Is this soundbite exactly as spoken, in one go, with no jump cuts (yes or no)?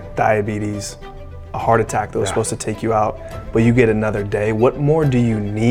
yes